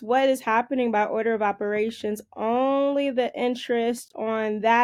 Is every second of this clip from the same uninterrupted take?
yes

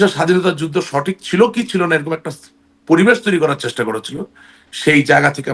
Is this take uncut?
yes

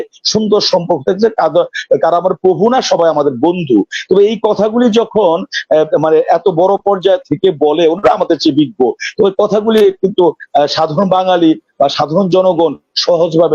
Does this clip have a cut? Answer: no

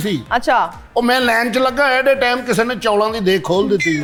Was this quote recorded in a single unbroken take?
yes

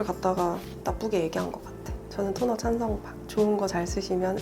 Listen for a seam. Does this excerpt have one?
yes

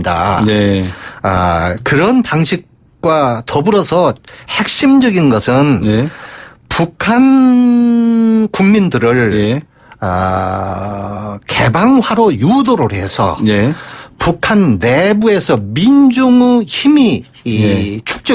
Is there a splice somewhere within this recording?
yes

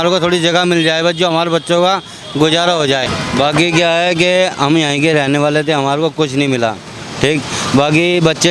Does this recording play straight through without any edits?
no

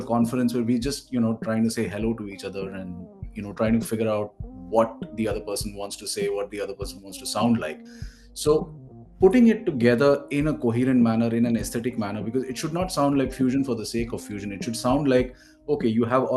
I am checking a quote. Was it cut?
no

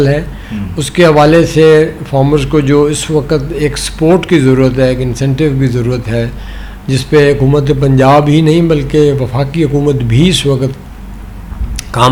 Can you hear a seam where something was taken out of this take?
no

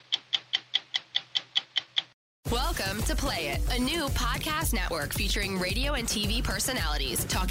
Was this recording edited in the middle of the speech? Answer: yes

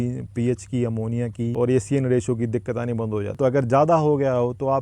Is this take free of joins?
no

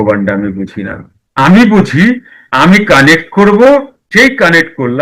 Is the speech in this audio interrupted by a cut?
yes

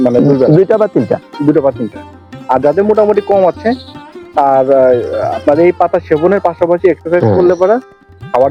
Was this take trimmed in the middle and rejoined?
no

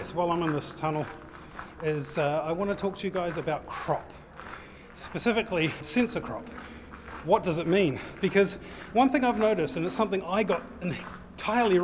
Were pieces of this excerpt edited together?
yes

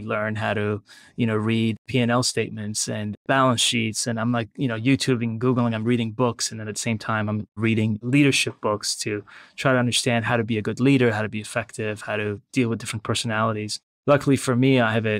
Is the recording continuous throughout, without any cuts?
yes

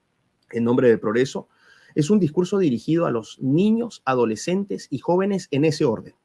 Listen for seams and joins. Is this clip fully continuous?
yes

